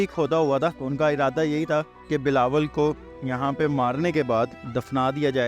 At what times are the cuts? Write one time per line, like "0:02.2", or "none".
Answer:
0:00.8
0:02.0
0:04.6